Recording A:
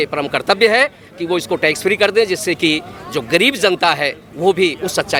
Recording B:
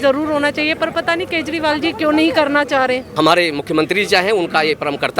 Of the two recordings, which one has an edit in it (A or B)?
B